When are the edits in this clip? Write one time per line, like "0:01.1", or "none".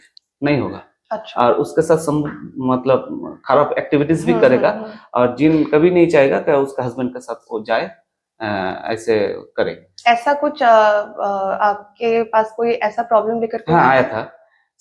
none